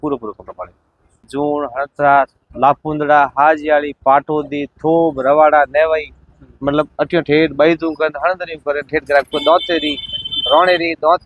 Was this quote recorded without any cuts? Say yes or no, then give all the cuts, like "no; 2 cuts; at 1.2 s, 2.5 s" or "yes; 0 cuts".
no; 1 cut; at 1.3 s